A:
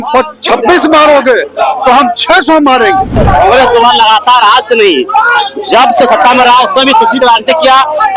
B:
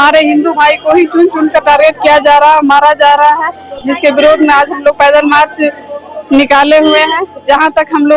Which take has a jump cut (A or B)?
A